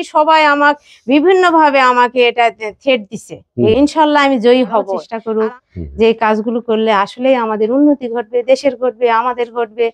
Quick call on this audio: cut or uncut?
cut